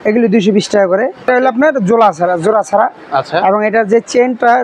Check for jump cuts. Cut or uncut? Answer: cut